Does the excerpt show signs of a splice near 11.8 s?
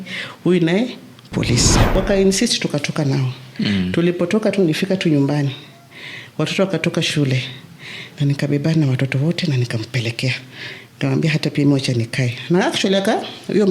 no; 1 cut; at 1.8 s

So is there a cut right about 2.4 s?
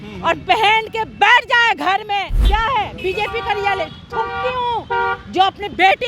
yes; 1 cut; at 2.4 s

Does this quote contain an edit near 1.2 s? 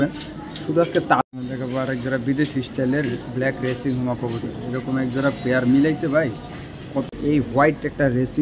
yes; 2 cuts; at 1.2 s, 7.1 s

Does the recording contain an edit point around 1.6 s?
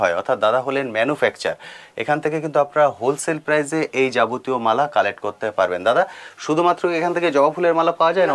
no; 0 cuts

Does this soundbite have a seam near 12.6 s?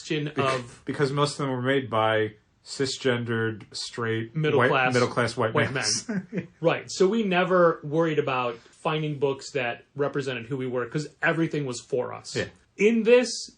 yes; 3 cuts; at 3.8 s, 8.7 s, 12.6 s

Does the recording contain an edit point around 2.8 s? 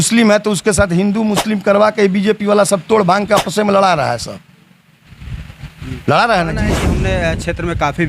no; 1 cut; at 6.8 s

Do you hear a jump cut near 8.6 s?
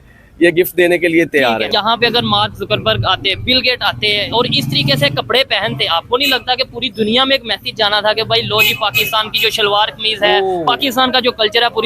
no; 1 cut; at 1.7 s

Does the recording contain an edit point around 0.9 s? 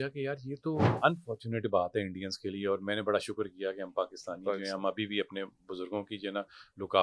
yes; 1 cut; at 0.9 s

